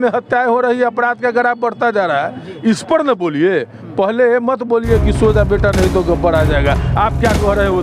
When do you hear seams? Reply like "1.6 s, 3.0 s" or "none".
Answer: none